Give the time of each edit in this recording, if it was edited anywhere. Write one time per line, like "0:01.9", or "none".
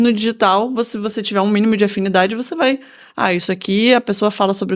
none

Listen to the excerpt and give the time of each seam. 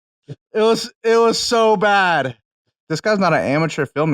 0:02.9

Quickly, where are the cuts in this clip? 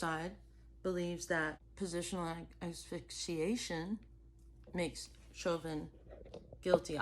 0:01.6

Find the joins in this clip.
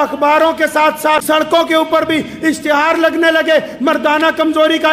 0:01.2

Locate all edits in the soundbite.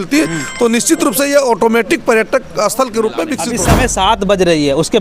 0:03.4

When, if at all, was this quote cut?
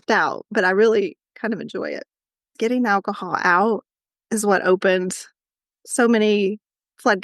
0:02.5

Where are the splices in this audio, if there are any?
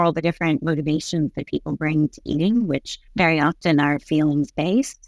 0:03.0

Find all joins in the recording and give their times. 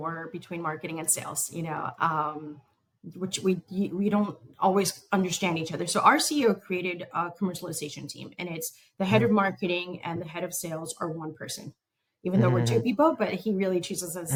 none

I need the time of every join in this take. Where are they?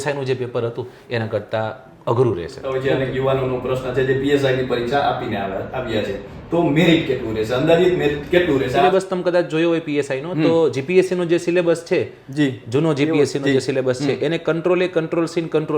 0:02.7
0:08.8

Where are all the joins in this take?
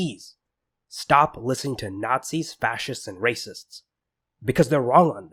none

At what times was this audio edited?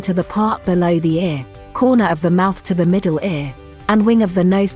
none

